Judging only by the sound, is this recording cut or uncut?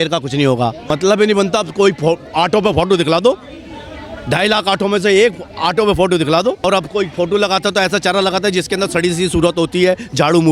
cut